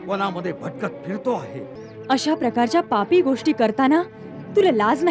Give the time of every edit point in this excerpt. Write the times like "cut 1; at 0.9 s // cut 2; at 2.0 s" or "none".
cut 1; at 1.8 s